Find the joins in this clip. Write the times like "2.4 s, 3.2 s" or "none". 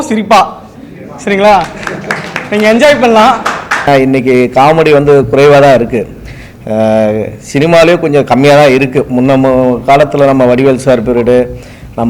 3.9 s